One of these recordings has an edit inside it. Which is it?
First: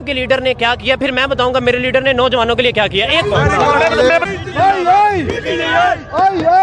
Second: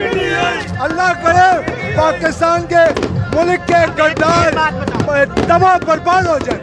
first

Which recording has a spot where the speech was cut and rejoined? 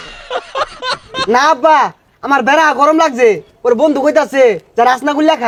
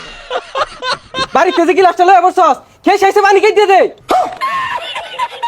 second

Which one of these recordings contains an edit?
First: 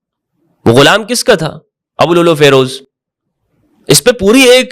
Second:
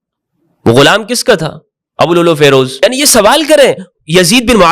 second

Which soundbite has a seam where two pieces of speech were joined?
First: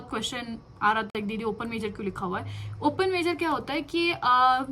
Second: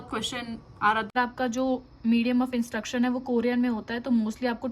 second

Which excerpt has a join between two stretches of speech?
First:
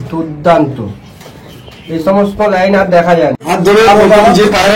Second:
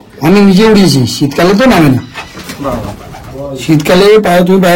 first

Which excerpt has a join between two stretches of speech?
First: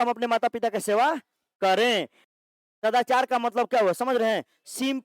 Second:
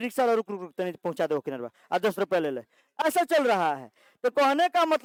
first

